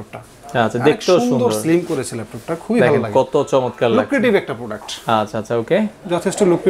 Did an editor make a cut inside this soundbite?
no; 0 cuts

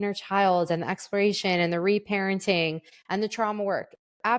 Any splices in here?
yes; 1 cut; at 2.9 s

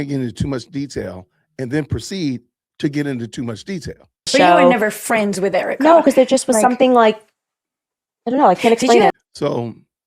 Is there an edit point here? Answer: yes; 2 cuts; at 4.3 s, 9.1 s

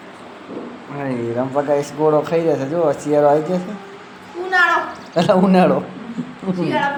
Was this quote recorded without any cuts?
yes; 0 cuts

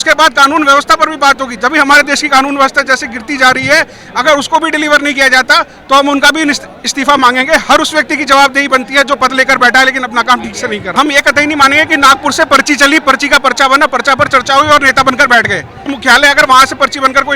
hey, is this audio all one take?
no; 2 cuts; at 10.9 s, 15.9 s

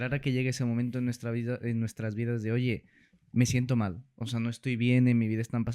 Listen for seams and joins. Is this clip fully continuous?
yes; 0 cuts

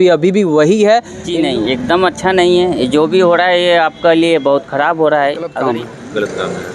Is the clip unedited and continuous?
no; 2 cuts; at 1.2 s, 5.5 s

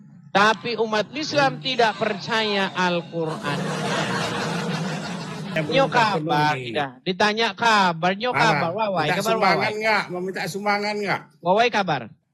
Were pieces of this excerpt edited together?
yes; 1 cut; at 5.5 s

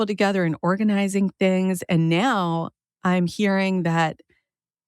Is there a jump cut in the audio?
no; 0 cuts

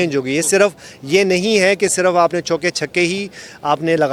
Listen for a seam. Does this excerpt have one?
no; 0 cuts

